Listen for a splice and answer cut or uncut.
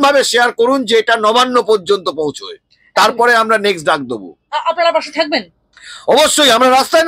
uncut